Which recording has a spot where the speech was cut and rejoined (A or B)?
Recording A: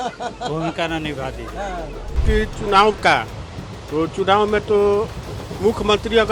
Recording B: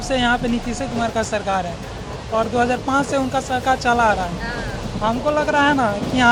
A